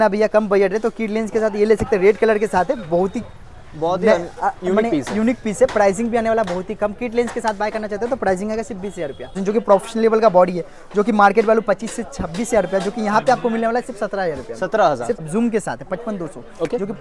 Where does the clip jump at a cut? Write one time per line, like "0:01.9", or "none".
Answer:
0:09.4
0:15.2